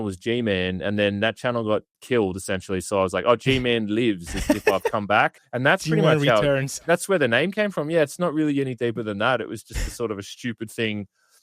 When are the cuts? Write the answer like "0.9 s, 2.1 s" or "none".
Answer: 1.9 s, 5.4 s